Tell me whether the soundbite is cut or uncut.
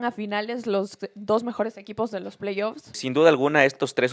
cut